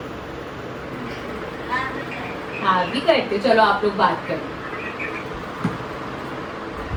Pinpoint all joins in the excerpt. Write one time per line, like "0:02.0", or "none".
none